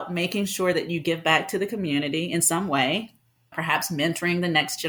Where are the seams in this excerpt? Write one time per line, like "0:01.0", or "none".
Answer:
0:03.5